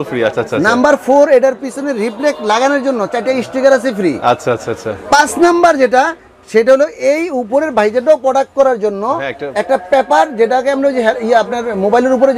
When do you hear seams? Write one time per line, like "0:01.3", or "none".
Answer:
none